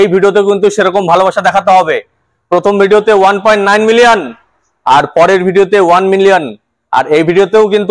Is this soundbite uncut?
yes; 0 cuts

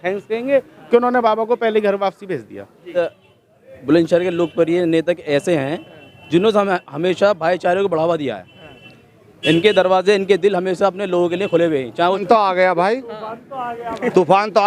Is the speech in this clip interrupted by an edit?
yes; 2 cuts; at 3.0 s, 12.2 s

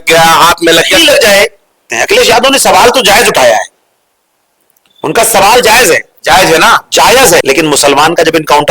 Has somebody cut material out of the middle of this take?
yes; 2 cuts; at 1.9 s, 7.4 s

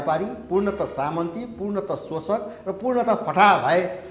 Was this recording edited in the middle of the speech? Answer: no; 0 cuts

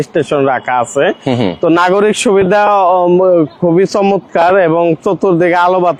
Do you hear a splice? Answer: no; 0 cuts

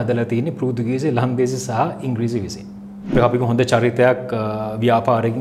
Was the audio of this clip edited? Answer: yes; 1 cut; at 3.2 s

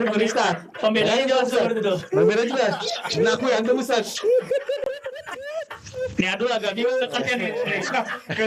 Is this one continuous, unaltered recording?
yes; 0 cuts

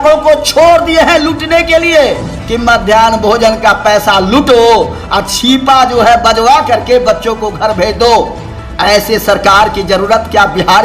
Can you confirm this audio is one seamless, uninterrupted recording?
yes; 0 cuts

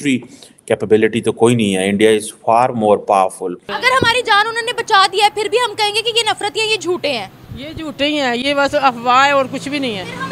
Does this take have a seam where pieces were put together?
yes; 1 cut; at 3.7 s

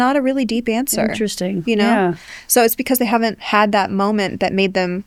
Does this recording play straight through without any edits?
yes; 0 cuts

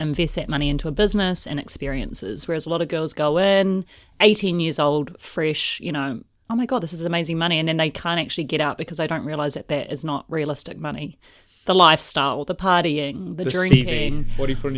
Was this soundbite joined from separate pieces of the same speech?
no; 0 cuts

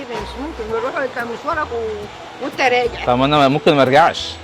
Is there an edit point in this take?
no; 0 cuts

